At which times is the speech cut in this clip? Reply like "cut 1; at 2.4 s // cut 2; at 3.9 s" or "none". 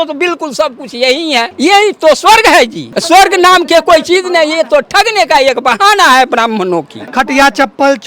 cut 1; at 1.5 s // cut 2; at 2.9 s // cut 3; at 7.0 s